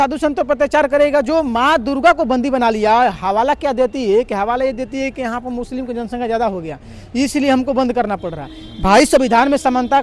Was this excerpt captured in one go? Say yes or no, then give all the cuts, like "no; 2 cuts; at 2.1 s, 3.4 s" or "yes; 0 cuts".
yes; 0 cuts